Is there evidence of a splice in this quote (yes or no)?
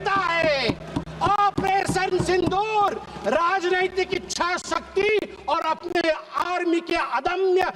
no